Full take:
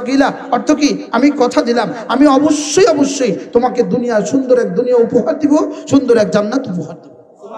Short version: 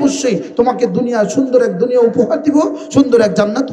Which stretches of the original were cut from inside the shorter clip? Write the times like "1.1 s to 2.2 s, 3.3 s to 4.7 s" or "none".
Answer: none